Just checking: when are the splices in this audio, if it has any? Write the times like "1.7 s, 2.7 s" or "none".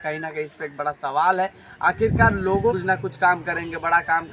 2.7 s